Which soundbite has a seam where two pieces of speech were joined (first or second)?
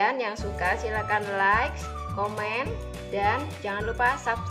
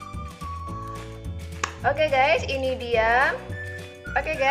second